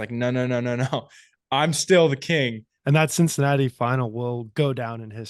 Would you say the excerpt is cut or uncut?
cut